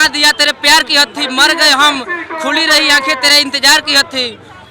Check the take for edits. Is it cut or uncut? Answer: uncut